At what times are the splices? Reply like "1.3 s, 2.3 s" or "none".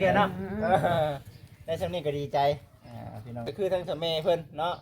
3.5 s